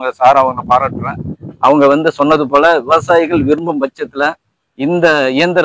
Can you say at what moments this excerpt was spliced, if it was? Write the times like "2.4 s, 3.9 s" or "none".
none